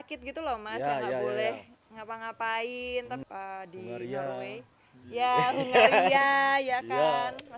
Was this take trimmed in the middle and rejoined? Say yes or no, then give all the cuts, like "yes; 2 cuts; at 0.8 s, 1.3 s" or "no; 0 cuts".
yes; 1 cut; at 3.2 s